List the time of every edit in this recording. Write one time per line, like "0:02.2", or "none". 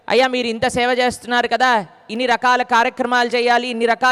none

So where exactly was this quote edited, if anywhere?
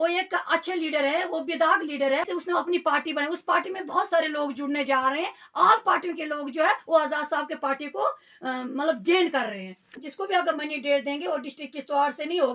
0:02.3
0:10.0

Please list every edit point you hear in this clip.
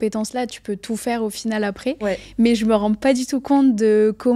none

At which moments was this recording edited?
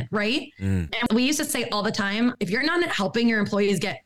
0:01.1

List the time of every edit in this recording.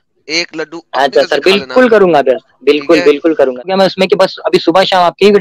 0:03.7

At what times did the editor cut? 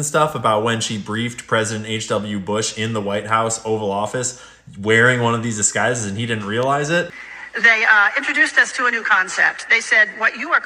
none

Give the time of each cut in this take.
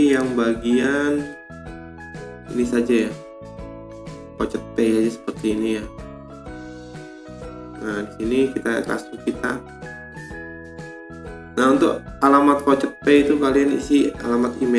none

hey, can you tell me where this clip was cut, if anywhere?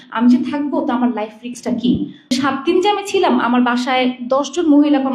0:02.3

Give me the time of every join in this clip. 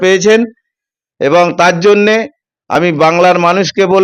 none

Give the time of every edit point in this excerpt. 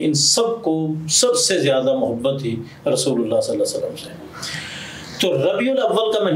none

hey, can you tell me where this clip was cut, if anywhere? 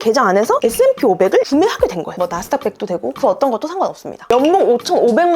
0:04.2

